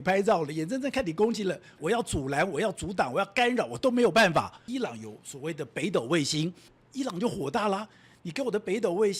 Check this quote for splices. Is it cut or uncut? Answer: cut